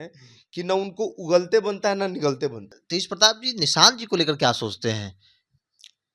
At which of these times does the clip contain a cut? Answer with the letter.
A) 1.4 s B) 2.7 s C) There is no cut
B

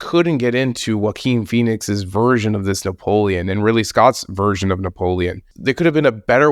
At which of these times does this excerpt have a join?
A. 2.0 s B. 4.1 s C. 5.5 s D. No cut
C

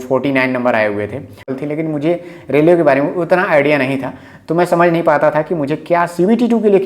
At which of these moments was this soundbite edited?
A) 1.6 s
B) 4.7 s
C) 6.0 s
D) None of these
A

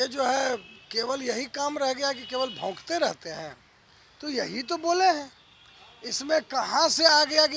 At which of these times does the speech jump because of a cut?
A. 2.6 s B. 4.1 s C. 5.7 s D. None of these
D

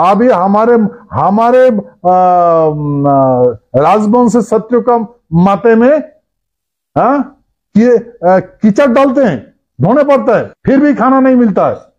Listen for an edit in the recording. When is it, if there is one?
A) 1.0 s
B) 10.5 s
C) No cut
B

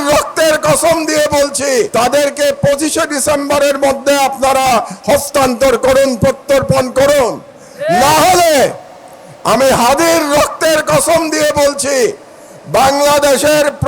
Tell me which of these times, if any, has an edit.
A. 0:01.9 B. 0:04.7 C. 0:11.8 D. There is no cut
A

